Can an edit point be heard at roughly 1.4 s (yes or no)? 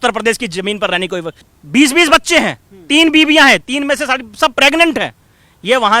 yes